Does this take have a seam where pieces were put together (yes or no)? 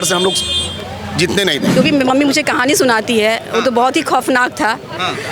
yes